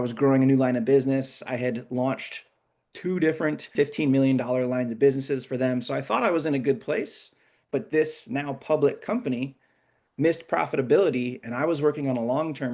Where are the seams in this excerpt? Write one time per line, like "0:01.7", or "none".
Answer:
0:03.7